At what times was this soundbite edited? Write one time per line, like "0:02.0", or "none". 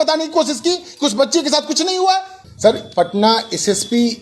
0:02.4